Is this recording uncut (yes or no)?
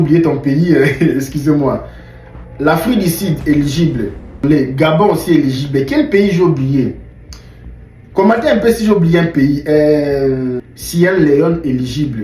no